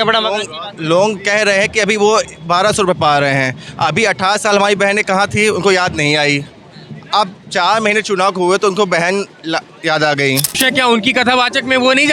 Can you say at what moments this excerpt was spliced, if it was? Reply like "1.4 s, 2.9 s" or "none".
10.6 s